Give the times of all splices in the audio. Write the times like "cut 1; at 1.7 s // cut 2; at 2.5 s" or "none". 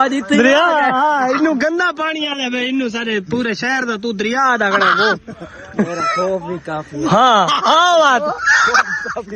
none